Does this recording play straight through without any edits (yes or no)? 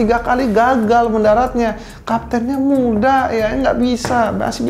yes